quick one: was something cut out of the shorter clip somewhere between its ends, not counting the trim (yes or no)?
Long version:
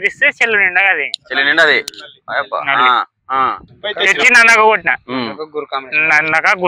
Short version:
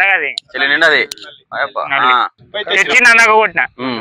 yes